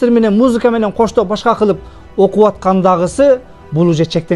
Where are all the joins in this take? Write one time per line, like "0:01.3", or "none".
none